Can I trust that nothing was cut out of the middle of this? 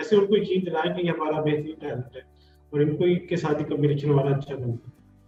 yes; 0 cuts

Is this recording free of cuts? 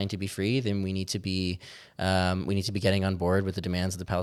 yes; 0 cuts

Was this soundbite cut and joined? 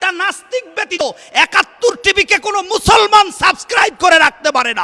yes; 1 cut; at 1.0 s

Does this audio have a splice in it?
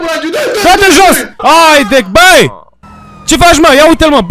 yes; 1 cut; at 1.3 s

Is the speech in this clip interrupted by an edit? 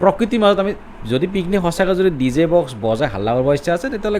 no; 0 cuts

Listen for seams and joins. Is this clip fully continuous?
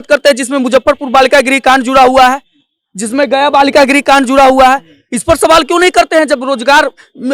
yes; 0 cuts

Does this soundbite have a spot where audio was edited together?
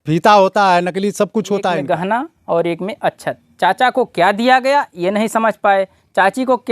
yes; 1 cut; at 1.8 s

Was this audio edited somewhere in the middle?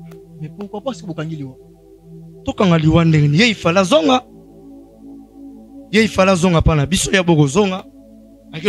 no; 0 cuts

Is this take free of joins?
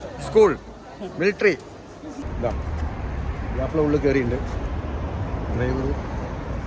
no; 1 cut; at 2.2 s

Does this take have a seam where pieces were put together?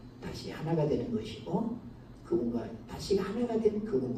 no; 0 cuts

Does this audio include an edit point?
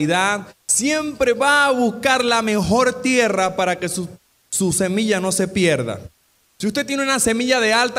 yes; 1 cut; at 6.0 s

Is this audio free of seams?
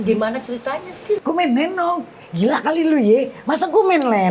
no; 1 cut; at 1.2 s

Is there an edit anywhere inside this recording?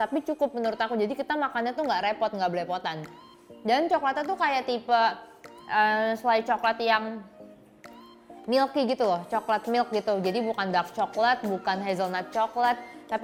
no; 0 cuts

